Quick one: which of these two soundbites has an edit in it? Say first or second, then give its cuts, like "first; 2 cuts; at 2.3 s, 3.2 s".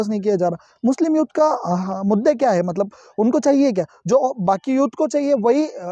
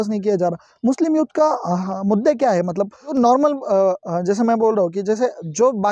second; 1 cut; at 3.1 s